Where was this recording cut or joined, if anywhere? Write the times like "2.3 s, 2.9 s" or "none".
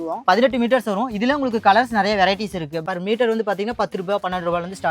2.8 s